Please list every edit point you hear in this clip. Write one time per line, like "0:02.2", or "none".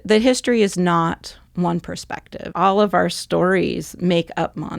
0:02.5